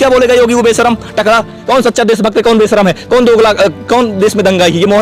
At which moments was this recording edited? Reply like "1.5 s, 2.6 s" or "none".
1.6 s